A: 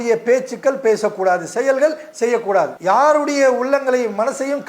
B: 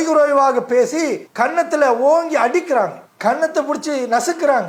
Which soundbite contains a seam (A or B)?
A